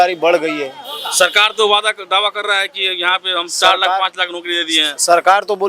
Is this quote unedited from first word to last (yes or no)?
yes